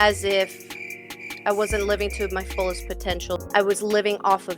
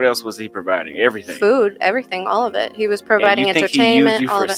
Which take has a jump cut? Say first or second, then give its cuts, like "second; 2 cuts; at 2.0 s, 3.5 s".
first; 1 cut; at 3.5 s